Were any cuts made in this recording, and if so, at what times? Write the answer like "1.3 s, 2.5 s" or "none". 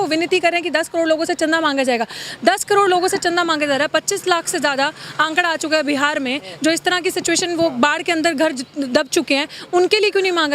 none